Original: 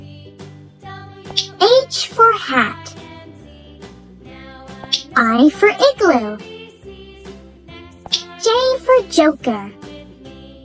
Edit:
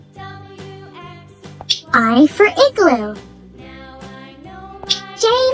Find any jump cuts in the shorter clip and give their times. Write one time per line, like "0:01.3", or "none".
0:00.9